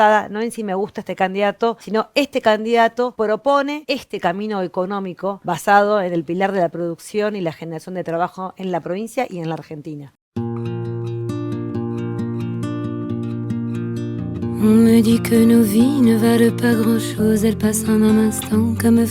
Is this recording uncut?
no; 5 cuts; at 1.8 s, 3.1 s, 3.8 s, 5.4 s, 10.1 s

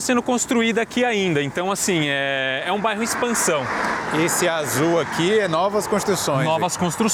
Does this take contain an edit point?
no; 0 cuts

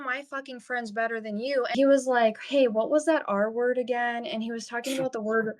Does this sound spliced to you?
yes; 1 cut; at 1.7 s

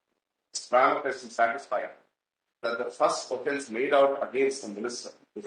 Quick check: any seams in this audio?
no; 0 cuts

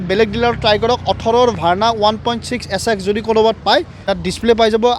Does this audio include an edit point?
yes; 1 cut; at 4.1 s

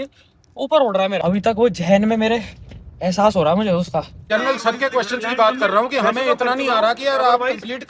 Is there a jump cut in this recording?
yes; 2 cuts; at 1.2 s, 4.2 s

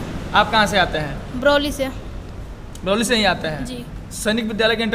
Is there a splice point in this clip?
no; 0 cuts

